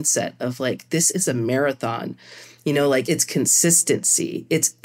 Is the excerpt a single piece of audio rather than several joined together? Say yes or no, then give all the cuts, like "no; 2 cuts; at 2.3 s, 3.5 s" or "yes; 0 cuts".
no; 1 cut; at 3.0 s